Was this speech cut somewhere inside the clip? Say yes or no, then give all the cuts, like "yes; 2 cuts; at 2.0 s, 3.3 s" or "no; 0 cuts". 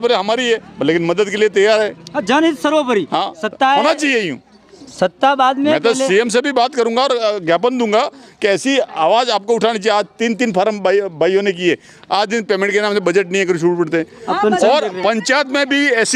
no; 0 cuts